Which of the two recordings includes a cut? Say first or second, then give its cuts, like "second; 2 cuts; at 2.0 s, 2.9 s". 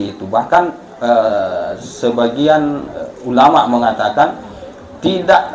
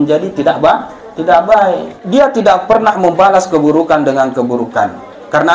second; 1 cut; at 2.0 s